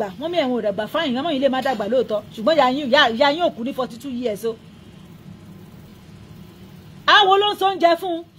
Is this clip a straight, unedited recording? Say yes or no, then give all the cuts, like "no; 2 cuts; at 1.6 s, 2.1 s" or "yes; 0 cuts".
no; 1 cut; at 5.7 s